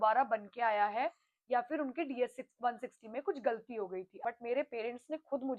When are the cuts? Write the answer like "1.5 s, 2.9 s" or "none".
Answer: 4.1 s